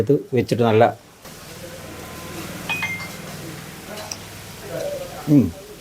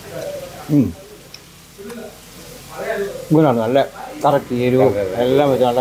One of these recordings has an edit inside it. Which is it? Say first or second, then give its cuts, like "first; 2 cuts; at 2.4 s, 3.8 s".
first; 1 cut; at 1.3 s